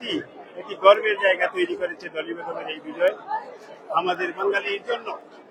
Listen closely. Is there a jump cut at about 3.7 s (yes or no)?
no